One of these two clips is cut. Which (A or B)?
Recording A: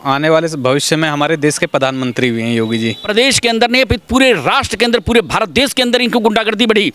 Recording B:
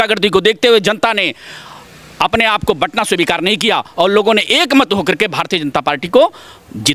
A